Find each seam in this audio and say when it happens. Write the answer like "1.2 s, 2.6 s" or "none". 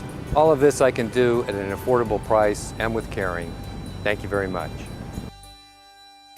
5.4 s